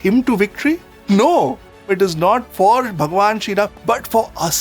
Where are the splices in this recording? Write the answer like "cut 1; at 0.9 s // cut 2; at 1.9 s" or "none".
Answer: cut 1; at 1.7 s // cut 2; at 3.8 s